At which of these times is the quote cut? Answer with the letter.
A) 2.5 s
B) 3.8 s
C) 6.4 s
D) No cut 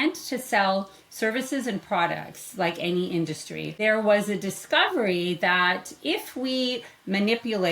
B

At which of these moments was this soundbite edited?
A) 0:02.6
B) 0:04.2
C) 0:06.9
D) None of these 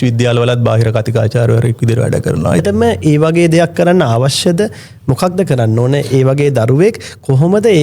A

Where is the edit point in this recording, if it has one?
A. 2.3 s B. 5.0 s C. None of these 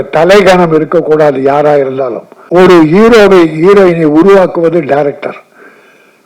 A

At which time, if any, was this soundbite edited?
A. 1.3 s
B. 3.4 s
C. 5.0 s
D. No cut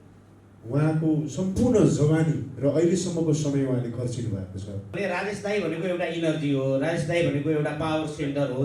C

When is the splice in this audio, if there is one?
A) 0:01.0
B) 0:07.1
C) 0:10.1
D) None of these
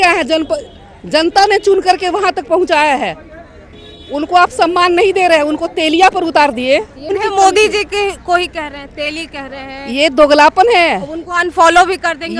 B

